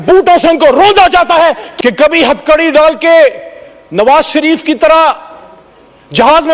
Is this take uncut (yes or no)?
no